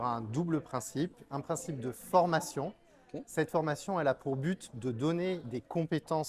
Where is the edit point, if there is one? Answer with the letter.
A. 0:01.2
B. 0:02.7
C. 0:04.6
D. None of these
D